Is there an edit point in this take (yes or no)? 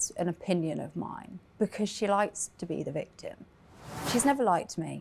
yes